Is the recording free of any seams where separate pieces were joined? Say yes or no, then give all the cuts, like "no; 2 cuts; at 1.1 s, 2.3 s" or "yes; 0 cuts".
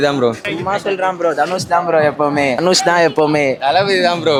yes; 0 cuts